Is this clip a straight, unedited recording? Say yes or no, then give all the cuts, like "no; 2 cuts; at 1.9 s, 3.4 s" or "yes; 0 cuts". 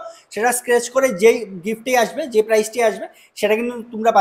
yes; 0 cuts